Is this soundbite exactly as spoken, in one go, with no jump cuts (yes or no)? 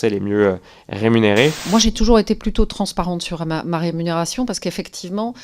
no